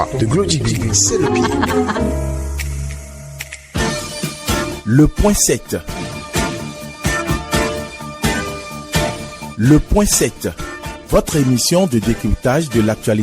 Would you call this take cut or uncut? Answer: cut